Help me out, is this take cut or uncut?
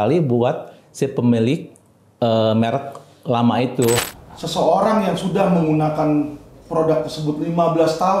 cut